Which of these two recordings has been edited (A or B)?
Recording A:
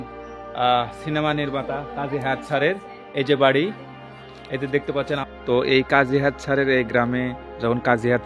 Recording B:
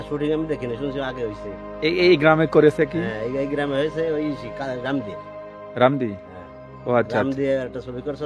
A